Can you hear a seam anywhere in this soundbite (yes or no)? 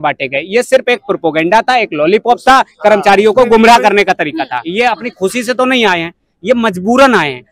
yes